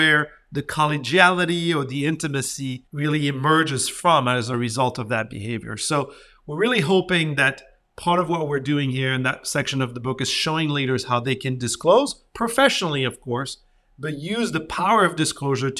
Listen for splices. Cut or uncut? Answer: cut